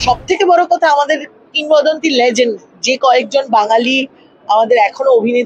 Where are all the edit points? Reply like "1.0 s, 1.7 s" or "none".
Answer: none